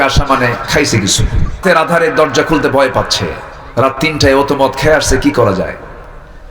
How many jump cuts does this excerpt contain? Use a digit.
1